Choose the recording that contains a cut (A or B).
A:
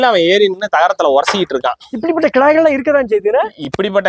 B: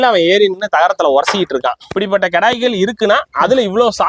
B